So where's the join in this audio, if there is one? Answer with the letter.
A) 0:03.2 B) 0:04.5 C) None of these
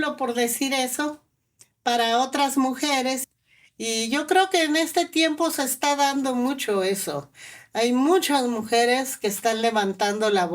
A